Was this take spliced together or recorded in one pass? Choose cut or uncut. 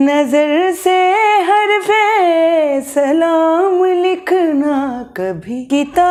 uncut